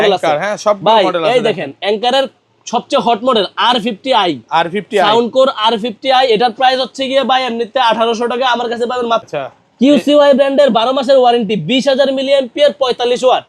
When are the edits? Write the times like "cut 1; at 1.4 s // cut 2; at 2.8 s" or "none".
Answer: cut 1; at 9.2 s